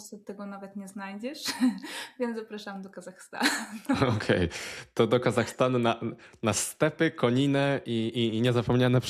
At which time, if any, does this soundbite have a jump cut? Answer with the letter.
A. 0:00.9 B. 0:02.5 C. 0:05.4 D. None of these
D